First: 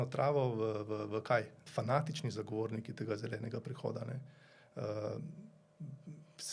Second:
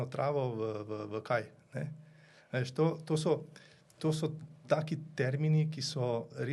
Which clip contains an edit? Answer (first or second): first